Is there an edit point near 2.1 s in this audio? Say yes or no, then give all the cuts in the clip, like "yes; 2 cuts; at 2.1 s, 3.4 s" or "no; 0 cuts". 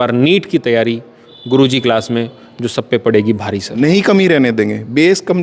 no; 1 cut; at 3.7 s